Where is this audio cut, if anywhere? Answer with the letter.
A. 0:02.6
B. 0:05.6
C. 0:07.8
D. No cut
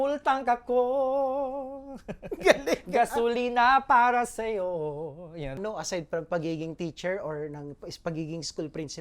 B